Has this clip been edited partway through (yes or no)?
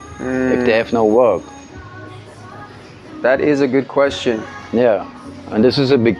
no